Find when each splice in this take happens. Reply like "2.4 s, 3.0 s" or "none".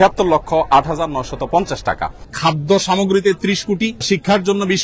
2.2 s, 4.0 s